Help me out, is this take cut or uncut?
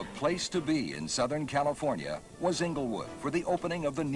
cut